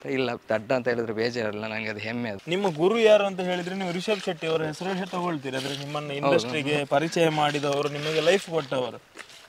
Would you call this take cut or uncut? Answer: cut